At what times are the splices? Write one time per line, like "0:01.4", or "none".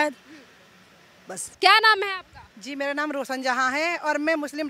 0:01.4